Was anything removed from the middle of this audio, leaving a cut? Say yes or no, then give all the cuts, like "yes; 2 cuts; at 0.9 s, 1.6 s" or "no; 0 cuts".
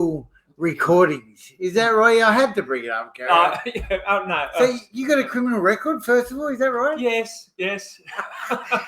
no; 0 cuts